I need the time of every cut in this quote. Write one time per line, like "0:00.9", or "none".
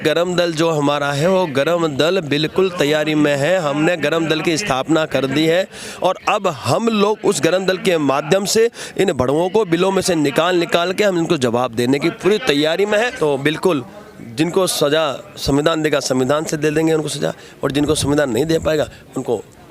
0:13.1